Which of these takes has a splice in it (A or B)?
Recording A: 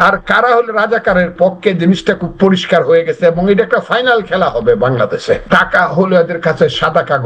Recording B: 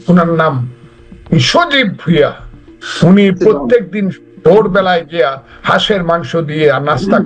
A